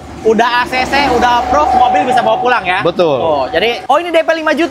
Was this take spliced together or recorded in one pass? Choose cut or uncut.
cut